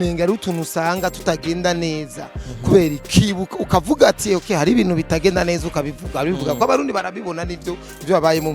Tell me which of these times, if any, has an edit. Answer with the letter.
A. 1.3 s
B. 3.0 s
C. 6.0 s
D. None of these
B